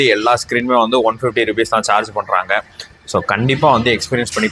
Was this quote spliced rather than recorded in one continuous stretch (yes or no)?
no